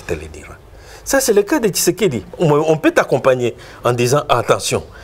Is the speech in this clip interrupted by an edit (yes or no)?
no